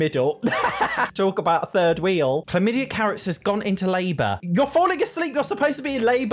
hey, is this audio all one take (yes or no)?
no